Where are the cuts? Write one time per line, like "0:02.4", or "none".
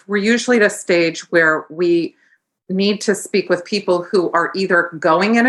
none